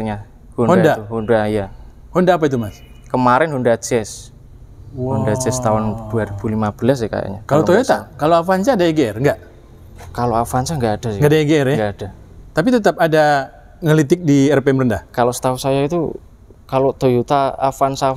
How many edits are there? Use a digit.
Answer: 0